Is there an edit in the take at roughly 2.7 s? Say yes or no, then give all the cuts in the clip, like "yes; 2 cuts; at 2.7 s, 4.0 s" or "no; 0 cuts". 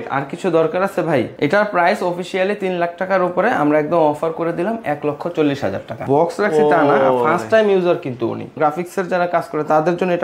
no; 3 cuts; at 1.3 s, 5.9 s, 8.6 s